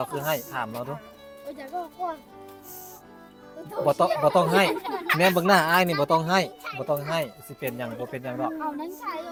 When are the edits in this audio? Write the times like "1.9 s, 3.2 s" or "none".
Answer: none